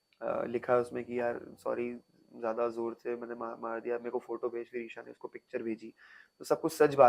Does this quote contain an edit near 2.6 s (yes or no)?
no